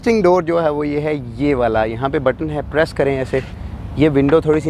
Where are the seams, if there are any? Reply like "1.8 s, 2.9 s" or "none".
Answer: none